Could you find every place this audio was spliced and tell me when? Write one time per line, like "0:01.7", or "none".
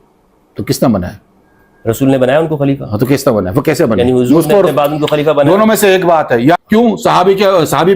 0:06.6